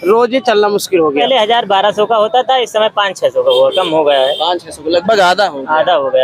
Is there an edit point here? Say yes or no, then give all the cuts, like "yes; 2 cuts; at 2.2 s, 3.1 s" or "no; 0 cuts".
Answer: yes; 1 cut; at 1.2 s